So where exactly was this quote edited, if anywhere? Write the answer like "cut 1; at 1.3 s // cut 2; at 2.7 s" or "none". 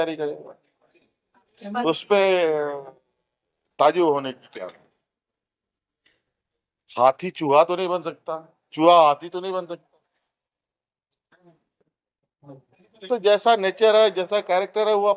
none